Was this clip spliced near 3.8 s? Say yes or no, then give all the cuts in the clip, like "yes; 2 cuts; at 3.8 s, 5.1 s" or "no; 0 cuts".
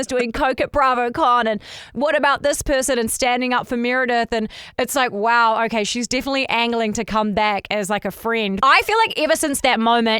no; 1 cut; at 8.6 s